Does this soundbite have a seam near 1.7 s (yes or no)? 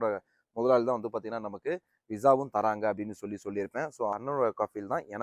no